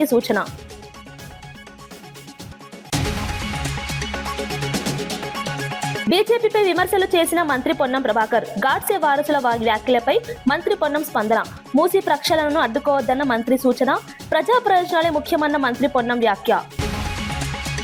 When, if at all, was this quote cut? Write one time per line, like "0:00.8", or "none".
0:16.8